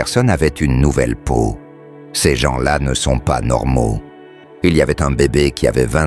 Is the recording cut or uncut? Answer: uncut